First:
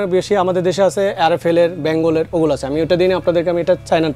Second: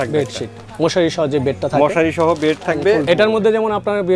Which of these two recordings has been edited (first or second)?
second